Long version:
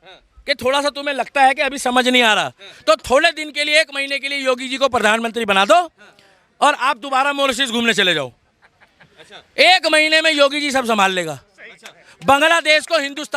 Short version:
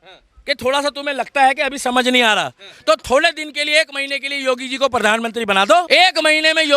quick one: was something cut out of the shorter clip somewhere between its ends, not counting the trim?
yes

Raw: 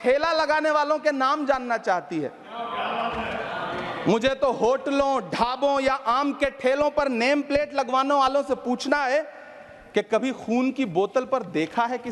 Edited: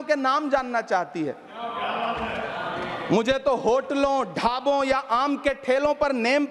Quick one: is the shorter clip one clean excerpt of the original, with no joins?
yes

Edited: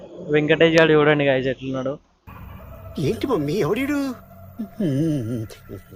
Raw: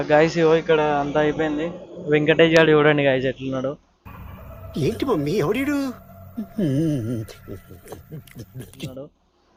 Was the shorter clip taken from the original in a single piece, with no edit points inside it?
yes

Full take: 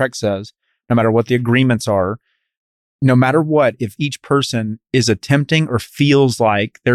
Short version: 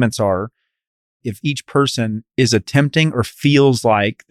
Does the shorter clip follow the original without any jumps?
no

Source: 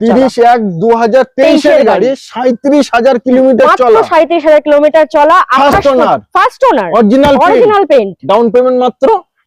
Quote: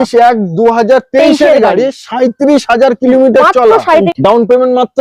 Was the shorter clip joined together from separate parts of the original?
yes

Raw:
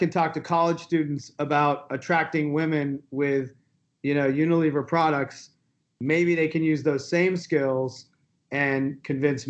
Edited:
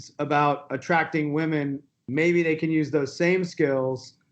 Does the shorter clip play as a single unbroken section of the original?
no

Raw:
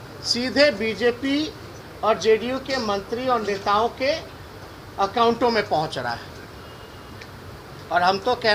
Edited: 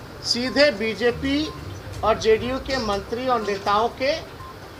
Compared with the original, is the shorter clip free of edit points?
yes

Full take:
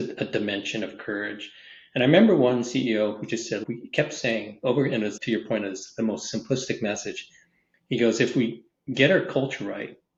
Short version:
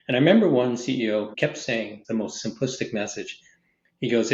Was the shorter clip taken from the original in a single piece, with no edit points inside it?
no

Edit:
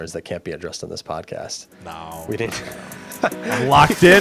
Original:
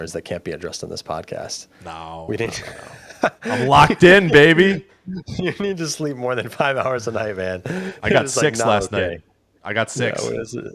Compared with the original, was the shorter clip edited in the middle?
no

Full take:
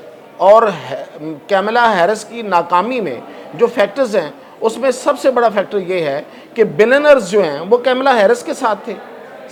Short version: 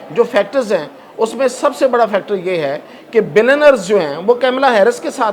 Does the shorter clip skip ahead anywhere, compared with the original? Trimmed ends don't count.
no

